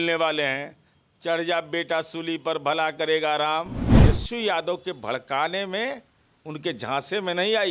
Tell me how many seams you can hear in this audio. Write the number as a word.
one